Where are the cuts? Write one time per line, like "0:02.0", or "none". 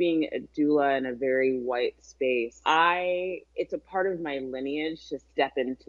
0:02.5
0:03.4